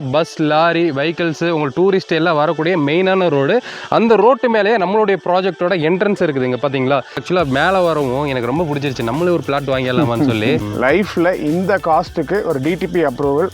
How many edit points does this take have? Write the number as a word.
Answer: two